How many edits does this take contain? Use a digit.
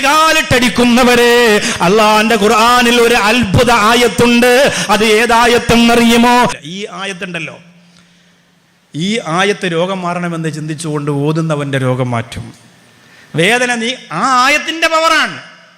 1